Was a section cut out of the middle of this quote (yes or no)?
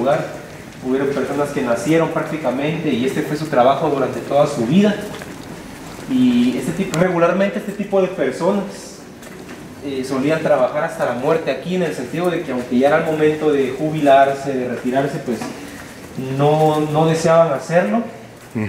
no